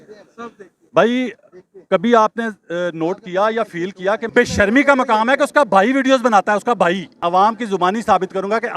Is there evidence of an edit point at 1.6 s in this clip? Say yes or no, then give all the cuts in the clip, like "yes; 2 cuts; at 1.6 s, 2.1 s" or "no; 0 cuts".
no; 2 cuts; at 4.3 s, 7.2 s